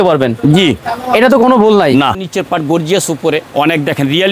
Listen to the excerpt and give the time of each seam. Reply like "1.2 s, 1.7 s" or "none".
2.2 s, 3.5 s

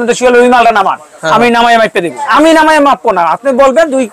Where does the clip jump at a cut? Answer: 2.2 s

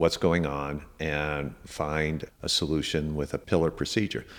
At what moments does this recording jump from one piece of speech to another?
2.3 s, 3.4 s

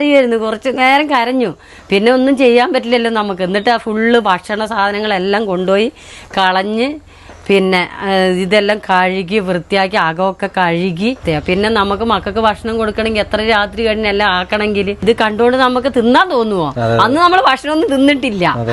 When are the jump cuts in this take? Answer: 11.2 s, 15.0 s

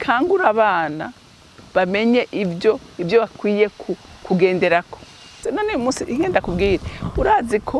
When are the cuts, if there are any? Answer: 5.4 s

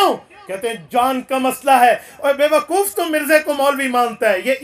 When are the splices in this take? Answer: none

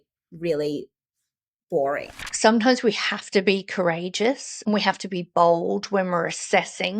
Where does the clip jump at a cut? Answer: 2.2 s

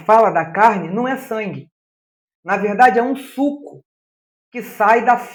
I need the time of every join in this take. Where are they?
none

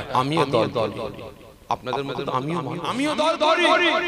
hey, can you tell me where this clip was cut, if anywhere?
2.8 s

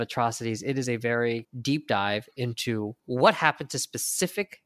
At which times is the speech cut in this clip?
3.0 s

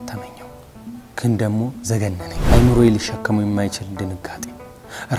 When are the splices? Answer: 2.3 s

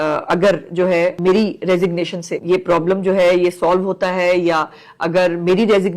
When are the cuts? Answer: 1.2 s, 2.3 s

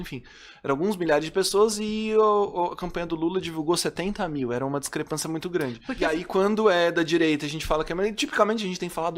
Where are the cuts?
6.2 s

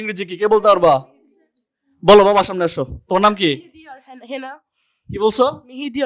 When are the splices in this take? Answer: none

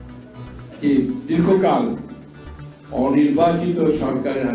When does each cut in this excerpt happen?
2.0 s

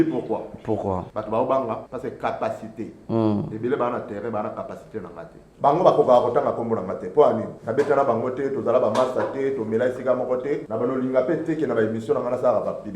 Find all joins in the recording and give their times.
1.1 s, 1.9 s, 5.4 s, 7.6 s, 10.7 s

